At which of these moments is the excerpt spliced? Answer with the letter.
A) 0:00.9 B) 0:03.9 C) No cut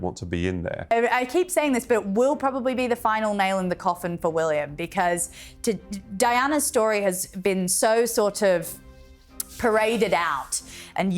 A